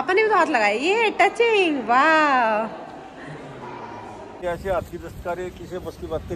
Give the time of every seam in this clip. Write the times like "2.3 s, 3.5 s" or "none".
4.4 s